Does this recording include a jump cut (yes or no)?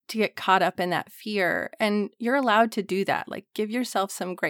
no